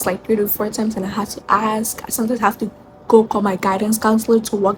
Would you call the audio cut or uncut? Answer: uncut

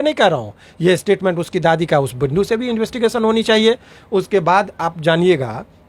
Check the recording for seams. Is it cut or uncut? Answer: uncut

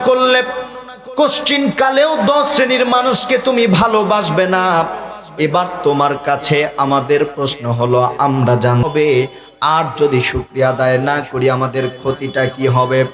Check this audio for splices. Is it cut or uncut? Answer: cut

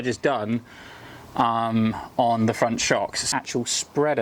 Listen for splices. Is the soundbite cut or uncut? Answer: cut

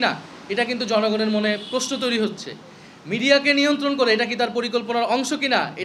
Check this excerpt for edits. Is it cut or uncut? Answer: uncut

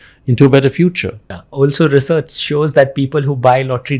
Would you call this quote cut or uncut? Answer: cut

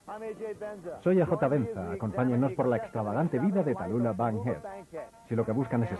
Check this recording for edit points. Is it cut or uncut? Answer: uncut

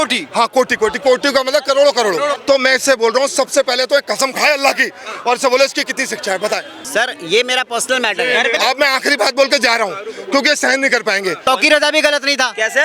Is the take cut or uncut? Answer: cut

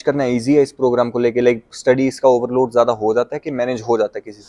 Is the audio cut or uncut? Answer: uncut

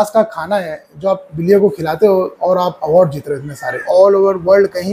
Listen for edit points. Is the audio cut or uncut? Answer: cut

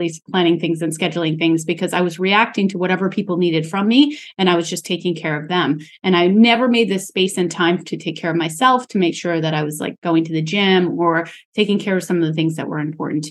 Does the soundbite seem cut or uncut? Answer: uncut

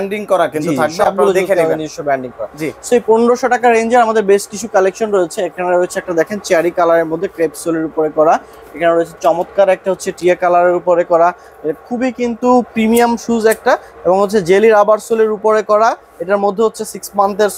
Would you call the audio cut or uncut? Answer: uncut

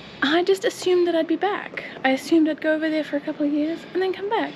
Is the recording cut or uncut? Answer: uncut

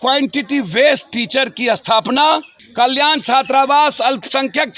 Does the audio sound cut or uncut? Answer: cut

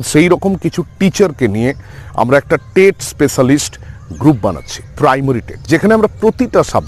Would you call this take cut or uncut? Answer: uncut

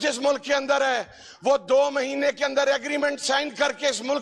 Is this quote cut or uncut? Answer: uncut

